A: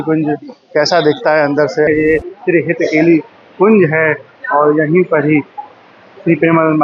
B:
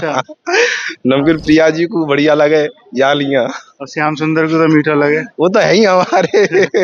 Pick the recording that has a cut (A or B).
A